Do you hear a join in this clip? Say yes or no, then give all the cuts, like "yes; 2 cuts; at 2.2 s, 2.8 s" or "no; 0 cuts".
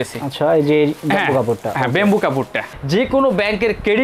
yes; 1 cut; at 2.7 s